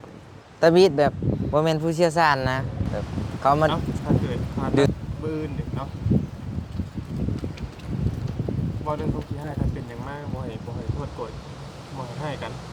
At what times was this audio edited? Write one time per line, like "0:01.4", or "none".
0:04.9